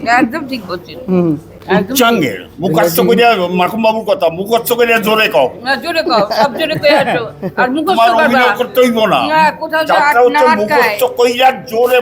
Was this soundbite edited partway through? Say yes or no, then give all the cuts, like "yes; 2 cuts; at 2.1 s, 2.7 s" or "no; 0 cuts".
no; 0 cuts